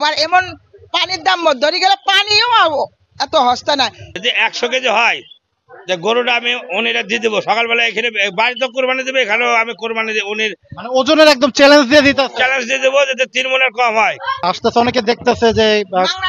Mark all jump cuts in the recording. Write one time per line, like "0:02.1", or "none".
0:04.0
0:14.4